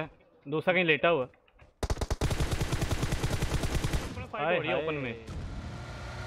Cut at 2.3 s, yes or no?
no